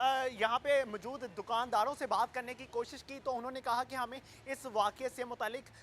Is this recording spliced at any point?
no; 0 cuts

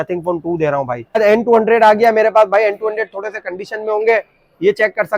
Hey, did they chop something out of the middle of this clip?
yes; 1 cut; at 1.2 s

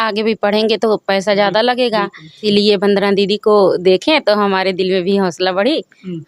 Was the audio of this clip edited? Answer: yes; 1 cut; at 2.4 s

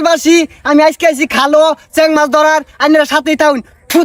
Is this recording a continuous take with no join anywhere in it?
yes; 0 cuts

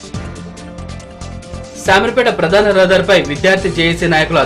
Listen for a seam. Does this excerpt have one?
yes; 1 cut; at 1.0 s

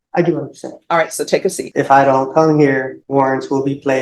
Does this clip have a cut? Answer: yes; 2 cuts; at 1.6 s, 3.0 s

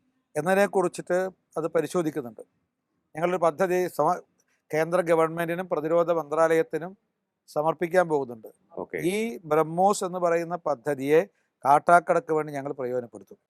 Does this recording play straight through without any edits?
yes; 0 cuts

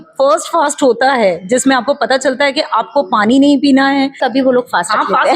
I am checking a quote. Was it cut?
yes; 1 cut; at 4.2 s

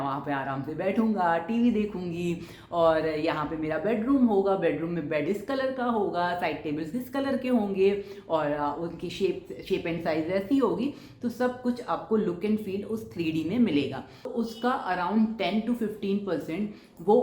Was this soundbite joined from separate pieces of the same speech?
yes; 1 cut; at 14.3 s

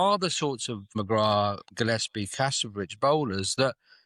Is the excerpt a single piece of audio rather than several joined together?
no; 1 cut; at 1.0 s

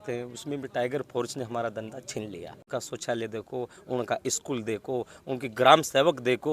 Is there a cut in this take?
yes; 1 cut; at 2.6 s

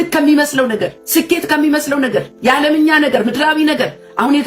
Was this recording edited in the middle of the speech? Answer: yes; 2 cuts; at 1.0 s, 2.3 s

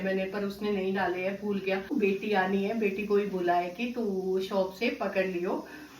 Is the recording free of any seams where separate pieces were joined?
no; 1 cut; at 1.9 s

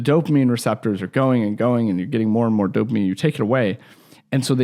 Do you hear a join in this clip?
no; 0 cuts

